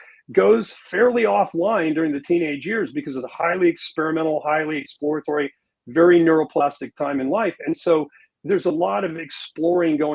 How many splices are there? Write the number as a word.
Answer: one